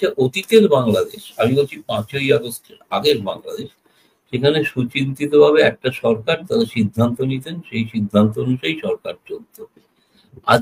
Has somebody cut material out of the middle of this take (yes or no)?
no